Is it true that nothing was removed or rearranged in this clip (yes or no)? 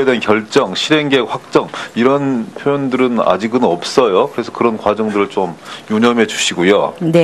no